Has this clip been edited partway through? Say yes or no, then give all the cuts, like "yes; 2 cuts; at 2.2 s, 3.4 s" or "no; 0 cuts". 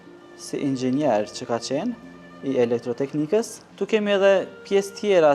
yes; 1 cut; at 3.6 s